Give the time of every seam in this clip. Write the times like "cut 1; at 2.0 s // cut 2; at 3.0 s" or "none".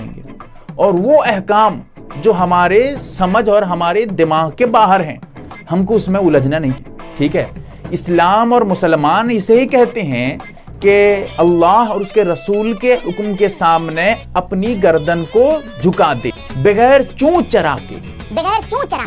none